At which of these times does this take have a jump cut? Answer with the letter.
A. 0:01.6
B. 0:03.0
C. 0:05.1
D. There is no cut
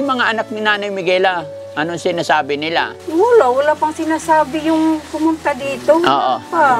B